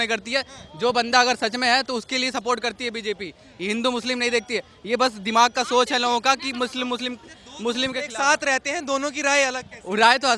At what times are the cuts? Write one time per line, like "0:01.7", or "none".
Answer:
none